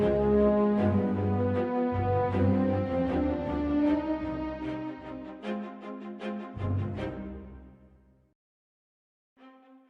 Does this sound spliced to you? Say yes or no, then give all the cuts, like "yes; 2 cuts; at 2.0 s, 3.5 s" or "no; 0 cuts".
yes; 1 cut; at 8.7 s